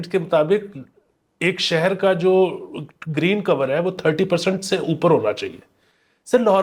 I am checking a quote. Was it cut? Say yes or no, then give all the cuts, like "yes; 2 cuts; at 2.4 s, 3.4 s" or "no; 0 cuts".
no; 0 cuts